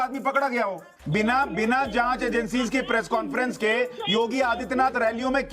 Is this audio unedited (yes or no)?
no